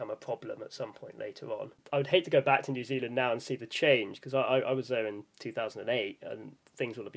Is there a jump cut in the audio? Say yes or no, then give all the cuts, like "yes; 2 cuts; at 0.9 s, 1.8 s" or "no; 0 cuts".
yes; 1 cut; at 1.7 s